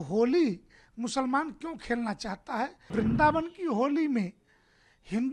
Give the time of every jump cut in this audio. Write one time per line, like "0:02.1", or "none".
0:02.9